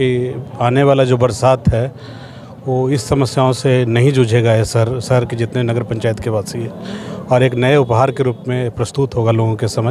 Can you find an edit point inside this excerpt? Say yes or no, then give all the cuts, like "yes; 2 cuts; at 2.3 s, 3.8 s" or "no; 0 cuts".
no; 0 cuts